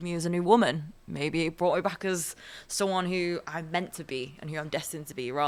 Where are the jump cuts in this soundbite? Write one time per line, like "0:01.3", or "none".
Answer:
none